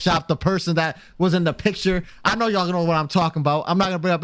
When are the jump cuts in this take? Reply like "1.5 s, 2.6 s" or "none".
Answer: none